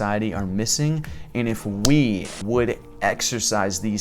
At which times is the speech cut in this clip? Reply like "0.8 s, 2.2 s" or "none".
2.3 s